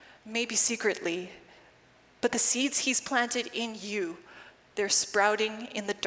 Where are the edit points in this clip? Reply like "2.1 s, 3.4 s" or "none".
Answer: none